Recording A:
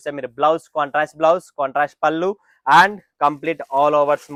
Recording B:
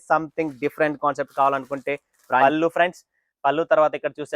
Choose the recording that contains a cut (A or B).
B